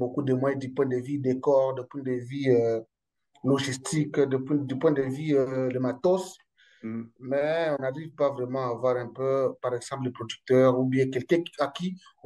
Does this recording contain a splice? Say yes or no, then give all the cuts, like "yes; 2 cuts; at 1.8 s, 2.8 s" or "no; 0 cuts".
no; 0 cuts